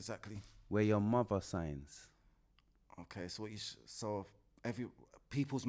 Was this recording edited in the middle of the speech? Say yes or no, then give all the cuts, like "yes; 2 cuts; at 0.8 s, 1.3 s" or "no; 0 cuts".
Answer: no; 0 cuts